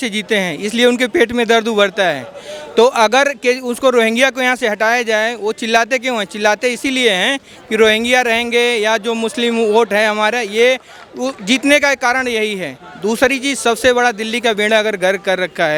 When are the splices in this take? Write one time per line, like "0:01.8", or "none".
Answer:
none